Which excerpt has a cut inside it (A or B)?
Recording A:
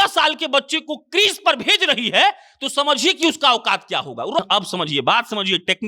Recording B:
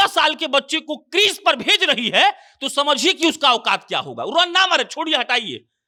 A